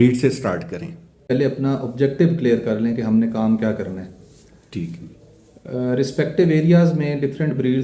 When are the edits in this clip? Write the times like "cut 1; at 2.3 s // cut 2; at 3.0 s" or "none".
cut 1; at 1.3 s